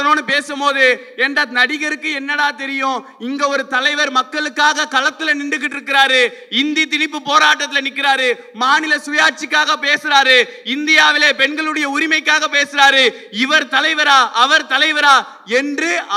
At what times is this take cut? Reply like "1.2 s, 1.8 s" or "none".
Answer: none